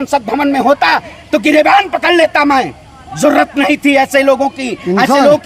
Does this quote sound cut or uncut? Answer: uncut